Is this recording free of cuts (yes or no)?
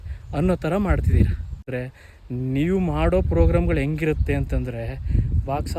no